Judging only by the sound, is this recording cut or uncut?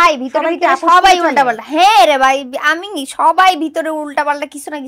uncut